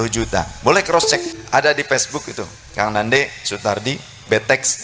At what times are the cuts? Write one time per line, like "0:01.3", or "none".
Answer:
0:01.3